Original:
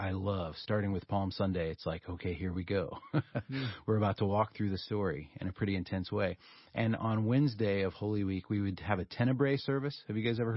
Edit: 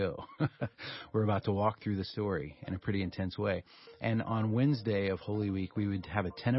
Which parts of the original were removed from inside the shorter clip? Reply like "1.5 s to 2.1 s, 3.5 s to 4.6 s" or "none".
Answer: none